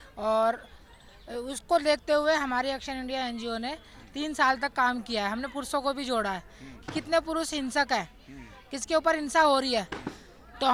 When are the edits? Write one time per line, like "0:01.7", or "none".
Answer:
none

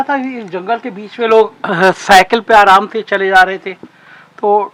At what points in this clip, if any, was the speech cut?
none

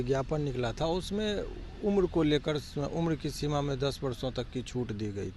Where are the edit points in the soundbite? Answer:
none

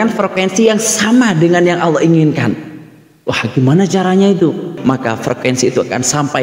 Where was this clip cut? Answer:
0:04.7

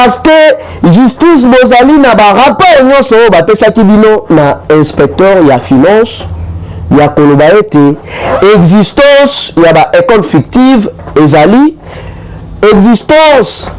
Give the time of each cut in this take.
none

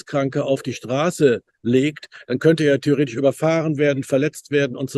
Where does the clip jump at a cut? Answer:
none

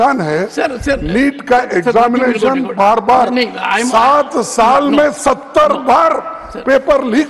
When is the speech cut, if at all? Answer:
none

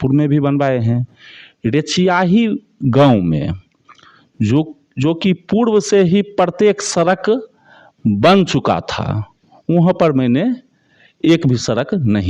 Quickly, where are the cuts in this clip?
none

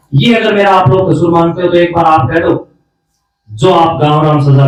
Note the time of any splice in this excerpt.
none

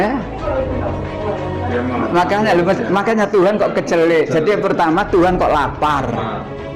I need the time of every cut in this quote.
none

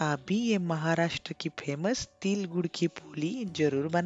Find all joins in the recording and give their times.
none

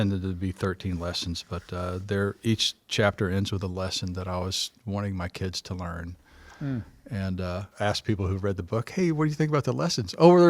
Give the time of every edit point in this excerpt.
0:07.7

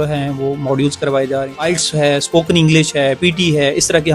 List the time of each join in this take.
0:01.7

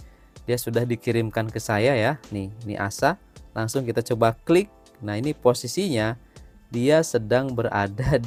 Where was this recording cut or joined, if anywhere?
none

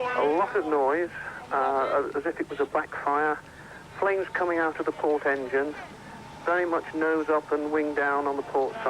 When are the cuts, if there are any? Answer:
0:06.9

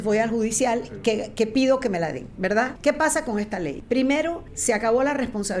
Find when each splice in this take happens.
0:02.7
0:03.8
0:04.5

